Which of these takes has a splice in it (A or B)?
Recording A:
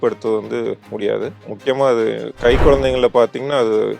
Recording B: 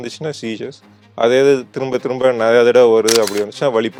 A